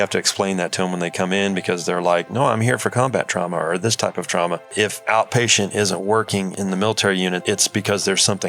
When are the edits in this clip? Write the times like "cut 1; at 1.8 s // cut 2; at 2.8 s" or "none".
cut 1; at 4.7 s // cut 2; at 6.5 s // cut 3; at 7.4 s